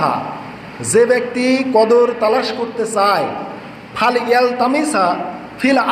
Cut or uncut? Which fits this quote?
uncut